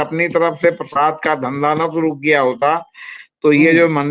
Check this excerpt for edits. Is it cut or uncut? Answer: uncut